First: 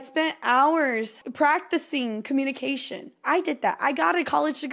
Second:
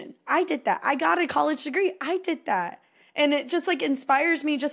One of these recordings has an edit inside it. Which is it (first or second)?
first